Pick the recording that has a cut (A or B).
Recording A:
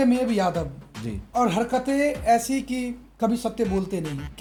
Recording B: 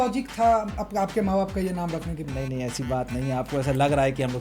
B